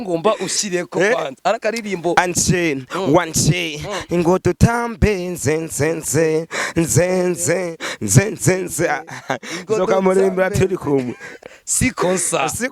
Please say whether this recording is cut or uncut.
cut